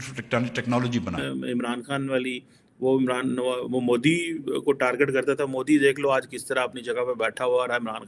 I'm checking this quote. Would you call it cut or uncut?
cut